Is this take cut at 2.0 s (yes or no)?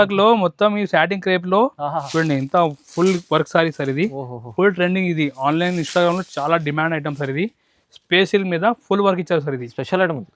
yes